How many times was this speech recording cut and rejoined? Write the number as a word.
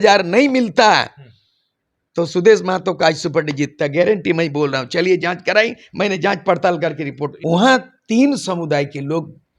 one